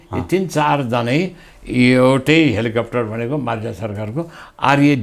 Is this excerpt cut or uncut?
uncut